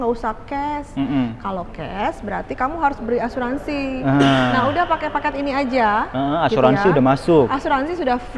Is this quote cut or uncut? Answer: uncut